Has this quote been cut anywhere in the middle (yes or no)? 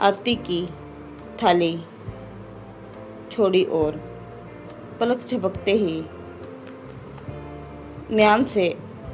no